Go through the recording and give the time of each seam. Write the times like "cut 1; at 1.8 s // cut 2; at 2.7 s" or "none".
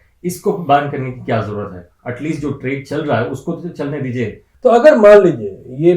cut 1; at 4.4 s